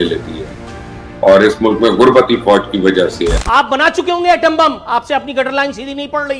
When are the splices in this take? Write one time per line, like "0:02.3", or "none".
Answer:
0:03.4